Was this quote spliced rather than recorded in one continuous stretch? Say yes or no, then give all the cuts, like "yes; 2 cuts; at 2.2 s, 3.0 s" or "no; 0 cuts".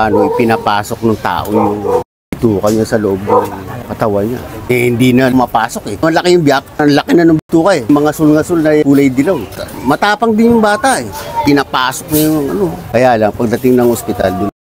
no; 0 cuts